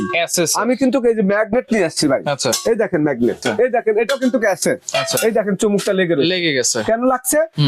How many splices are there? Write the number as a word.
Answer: one